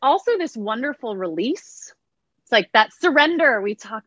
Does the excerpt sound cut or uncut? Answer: uncut